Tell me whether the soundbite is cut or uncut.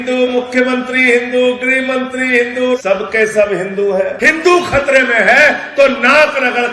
cut